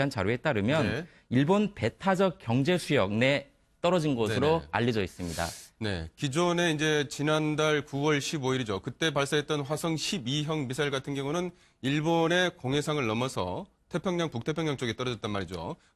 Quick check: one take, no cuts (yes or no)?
no